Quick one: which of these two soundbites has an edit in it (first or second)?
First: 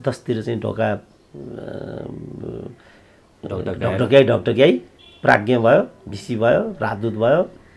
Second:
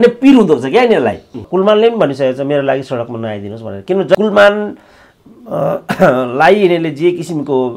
second